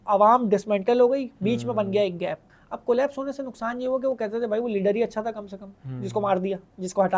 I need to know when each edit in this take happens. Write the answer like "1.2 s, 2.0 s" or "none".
2.5 s